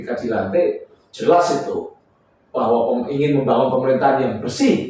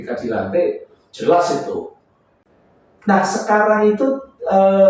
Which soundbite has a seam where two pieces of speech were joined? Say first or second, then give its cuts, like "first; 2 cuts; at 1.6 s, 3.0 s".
second; 1 cut; at 2.4 s